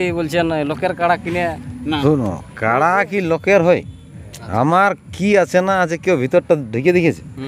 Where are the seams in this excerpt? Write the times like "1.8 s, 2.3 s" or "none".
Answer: 2.0 s